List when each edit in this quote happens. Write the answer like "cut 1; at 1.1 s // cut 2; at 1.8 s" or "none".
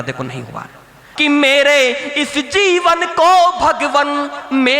cut 1; at 1.0 s